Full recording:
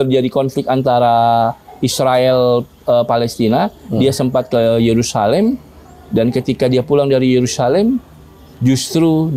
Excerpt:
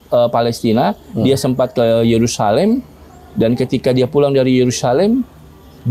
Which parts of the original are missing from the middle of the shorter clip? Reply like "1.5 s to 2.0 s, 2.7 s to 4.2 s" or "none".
none